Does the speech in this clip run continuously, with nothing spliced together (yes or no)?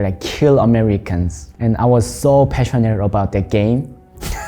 yes